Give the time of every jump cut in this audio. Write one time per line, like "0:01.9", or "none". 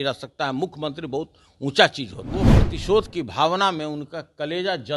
0:02.6